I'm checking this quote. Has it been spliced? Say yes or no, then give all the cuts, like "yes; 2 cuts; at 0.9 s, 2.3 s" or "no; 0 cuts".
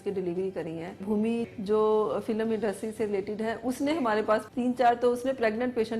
yes; 2 cuts; at 1.0 s, 4.4 s